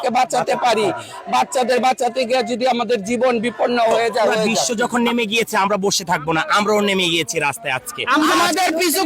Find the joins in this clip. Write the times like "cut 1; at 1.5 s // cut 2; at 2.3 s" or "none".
cut 1; at 4.6 s // cut 2; at 8.3 s